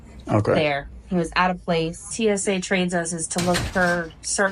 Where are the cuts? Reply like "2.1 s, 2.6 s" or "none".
2.1 s